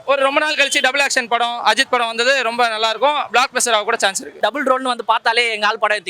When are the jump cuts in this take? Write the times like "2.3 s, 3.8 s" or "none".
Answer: 4.4 s